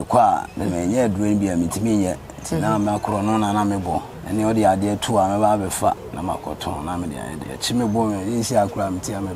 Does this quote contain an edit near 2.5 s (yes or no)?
no